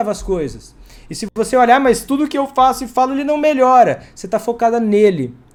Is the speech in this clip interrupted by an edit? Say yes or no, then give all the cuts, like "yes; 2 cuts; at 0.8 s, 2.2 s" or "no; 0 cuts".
no; 0 cuts